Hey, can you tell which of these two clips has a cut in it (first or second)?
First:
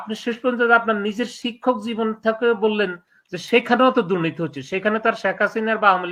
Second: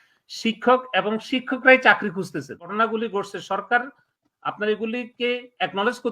second